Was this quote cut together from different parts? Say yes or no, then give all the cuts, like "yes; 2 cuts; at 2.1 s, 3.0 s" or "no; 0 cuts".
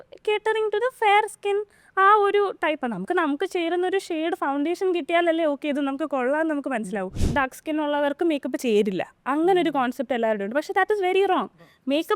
yes; 1 cut; at 7.2 s